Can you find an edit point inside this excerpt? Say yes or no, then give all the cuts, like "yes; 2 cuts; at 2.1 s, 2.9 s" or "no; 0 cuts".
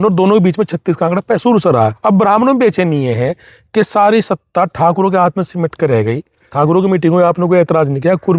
yes; 2 cuts; at 2.0 s, 6.4 s